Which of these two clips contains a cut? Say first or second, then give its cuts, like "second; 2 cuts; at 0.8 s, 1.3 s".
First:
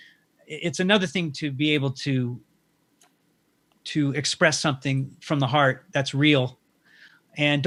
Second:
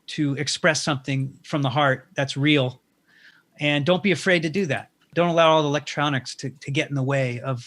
second; 1 cut; at 5.1 s